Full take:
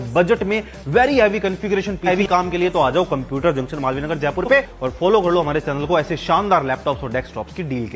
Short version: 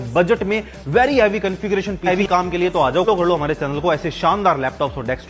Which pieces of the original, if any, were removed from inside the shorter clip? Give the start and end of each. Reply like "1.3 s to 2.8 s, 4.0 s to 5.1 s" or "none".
3.1 s to 5.1 s